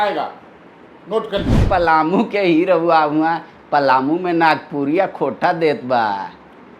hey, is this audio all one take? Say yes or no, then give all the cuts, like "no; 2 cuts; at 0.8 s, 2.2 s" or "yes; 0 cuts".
no; 1 cut; at 1.6 s